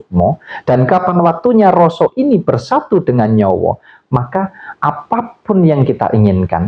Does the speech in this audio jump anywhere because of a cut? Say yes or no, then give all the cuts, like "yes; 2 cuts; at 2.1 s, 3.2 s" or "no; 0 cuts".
no; 0 cuts